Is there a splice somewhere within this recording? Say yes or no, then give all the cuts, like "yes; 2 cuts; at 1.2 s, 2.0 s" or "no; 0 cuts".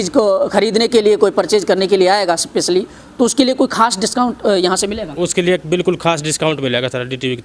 no; 0 cuts